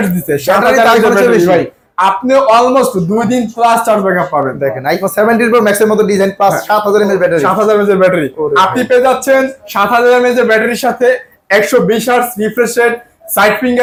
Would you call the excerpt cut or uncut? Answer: uncut